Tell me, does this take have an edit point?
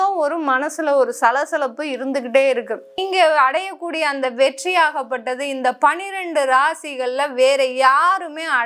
yes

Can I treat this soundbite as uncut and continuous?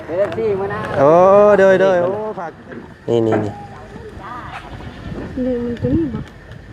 no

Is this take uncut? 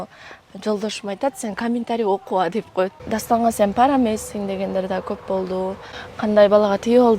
no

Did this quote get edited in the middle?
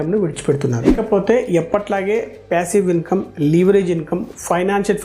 yes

